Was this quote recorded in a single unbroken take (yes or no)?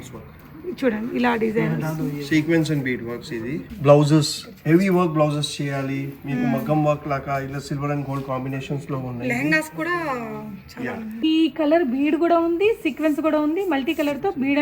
no